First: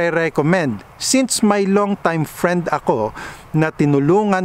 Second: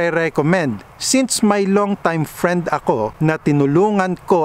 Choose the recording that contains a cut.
second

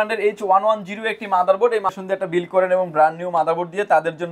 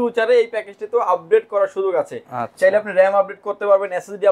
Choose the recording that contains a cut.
first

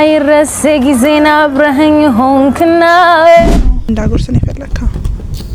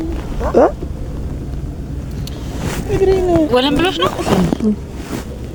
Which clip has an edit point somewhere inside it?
first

